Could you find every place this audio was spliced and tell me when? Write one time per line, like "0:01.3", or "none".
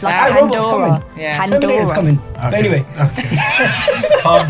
none